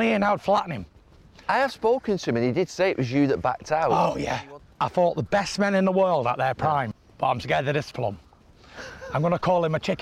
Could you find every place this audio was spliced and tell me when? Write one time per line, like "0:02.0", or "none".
0:04.4
0:07.0